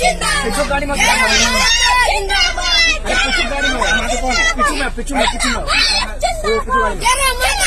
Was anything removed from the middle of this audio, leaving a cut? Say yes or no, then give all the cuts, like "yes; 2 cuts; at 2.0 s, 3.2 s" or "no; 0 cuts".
no; 0 cuts